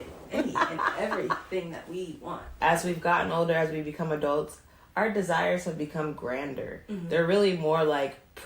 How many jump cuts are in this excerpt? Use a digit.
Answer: 1